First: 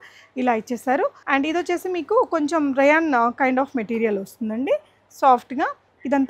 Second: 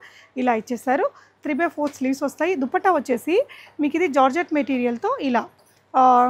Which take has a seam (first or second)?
first